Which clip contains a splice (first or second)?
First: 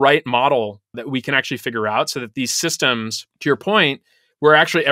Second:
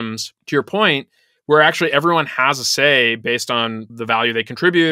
second